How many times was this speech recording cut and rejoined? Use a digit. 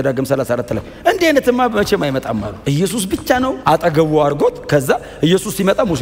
2